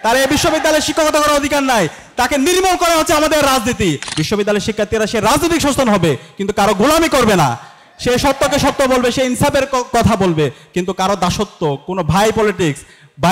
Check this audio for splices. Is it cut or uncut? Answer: cut